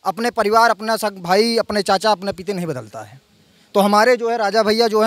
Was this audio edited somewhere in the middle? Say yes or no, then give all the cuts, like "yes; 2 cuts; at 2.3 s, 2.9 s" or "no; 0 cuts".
no; 0 cuts